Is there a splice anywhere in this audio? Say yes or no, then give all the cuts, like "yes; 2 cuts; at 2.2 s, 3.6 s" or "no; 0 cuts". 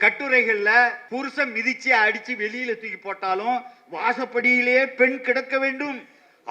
yes; 1 cut; at 1.0 s